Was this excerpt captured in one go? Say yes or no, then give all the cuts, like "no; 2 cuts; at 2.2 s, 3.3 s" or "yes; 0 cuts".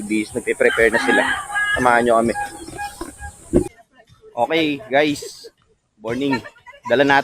no; 1 cut; at 3.7 s